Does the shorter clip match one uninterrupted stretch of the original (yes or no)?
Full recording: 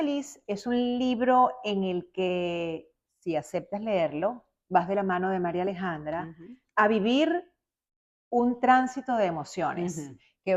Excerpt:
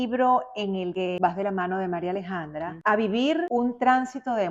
no